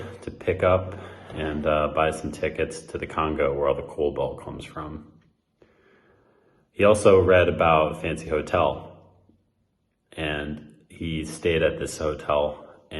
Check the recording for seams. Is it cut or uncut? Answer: uncut